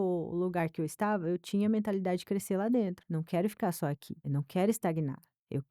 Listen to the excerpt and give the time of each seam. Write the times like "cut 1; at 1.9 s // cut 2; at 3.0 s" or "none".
cut 1; at 3.0 s // cut 2; at 4.1 s

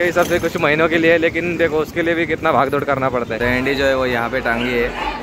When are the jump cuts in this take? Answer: cut 1; at 3.4 s

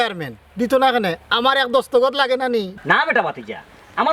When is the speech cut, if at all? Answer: cut 1; at 2.7 s

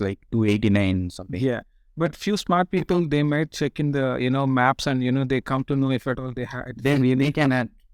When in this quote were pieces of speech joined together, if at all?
none

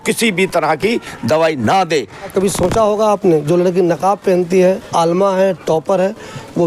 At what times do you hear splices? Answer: cut 1; at 2.3 s

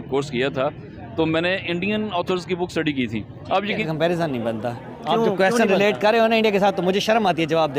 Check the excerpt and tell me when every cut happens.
cut 1; at 3.8 s

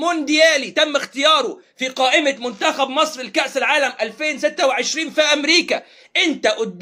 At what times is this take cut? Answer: none

